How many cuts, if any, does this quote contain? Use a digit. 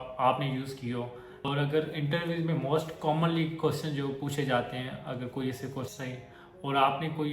2